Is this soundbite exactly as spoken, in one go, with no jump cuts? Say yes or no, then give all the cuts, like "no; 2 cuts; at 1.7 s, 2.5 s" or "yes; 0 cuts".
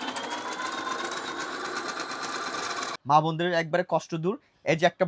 no; 1 cut; at 2.9 s